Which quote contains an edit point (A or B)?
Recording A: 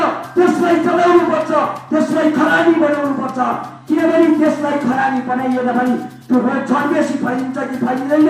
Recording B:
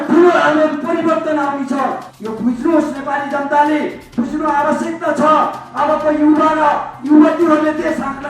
B